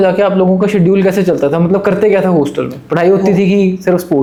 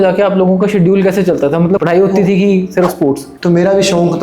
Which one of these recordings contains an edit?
second; 2 cuts; at 1.8 s, 3.3 s

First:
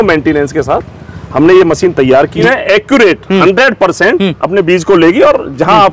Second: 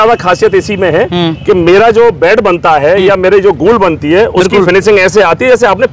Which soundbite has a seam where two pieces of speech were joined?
first; 1 cut; at 2.4 s

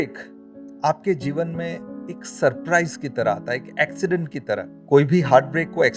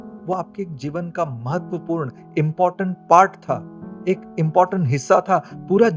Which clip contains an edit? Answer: first; 1 cut; at 4.7 s

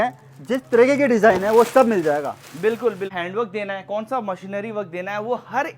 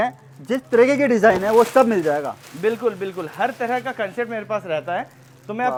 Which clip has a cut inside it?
first; 1 cut; at 3.1 s

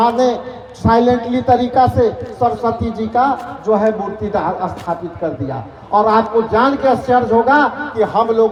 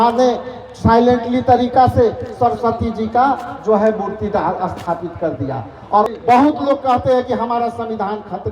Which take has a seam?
second; 1 cut; at 6.1 s

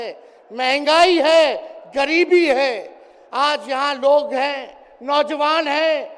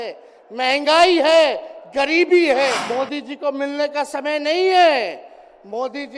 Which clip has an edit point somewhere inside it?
second; 1 cut; at 2.8 s

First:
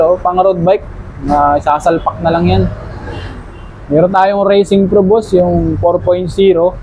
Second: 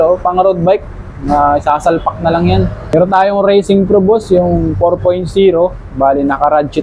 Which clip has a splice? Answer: second; 1 cut; at 2.9 s

